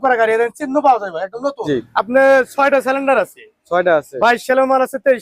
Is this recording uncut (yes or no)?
no